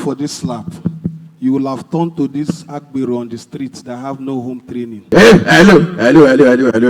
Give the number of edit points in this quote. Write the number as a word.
one